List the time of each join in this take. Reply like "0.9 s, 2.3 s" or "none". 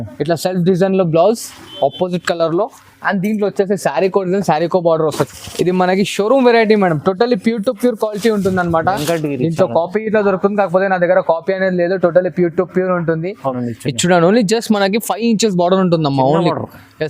5.2 s, 13.6 s